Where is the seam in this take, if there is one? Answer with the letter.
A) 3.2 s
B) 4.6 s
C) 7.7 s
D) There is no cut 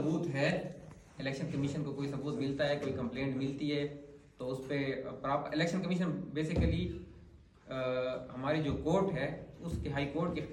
D